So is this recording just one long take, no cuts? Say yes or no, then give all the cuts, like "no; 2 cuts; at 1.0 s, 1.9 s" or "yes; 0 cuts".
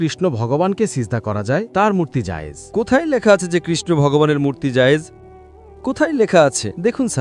yes; 0 cuts